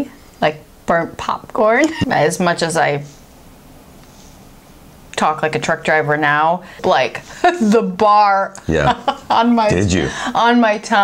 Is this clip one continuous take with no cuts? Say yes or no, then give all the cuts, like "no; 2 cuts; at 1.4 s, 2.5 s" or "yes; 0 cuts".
no; 2 cuts; at 2.0 s, 6.8 s